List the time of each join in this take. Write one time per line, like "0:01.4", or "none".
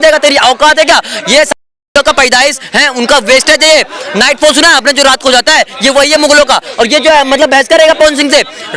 none